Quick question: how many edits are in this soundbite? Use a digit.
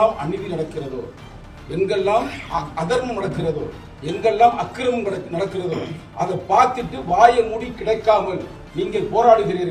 0